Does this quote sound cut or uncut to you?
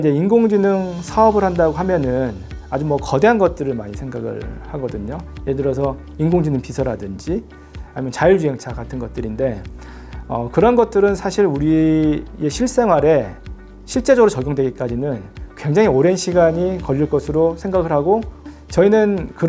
uncut